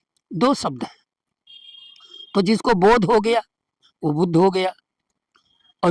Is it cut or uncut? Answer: uncut